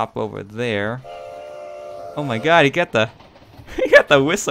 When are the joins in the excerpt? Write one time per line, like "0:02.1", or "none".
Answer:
none